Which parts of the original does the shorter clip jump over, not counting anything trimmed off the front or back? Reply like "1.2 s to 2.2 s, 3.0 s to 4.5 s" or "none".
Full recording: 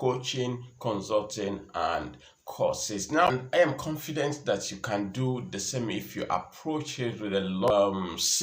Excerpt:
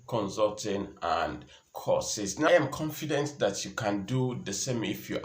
3.2 s to 3.5 s